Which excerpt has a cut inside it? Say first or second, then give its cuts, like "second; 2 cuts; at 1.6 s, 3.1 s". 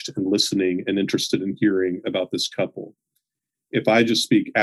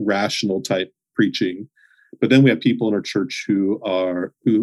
second; 1 cut; at 1.0 s